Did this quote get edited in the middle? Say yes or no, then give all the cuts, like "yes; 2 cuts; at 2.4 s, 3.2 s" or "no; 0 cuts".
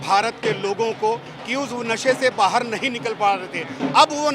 no; 0 cuts